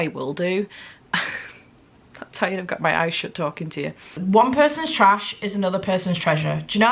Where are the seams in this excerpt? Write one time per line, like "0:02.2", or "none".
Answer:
0:04.0